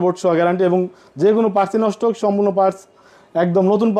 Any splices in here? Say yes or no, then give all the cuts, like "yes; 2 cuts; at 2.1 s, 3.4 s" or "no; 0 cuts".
no; 0 cuts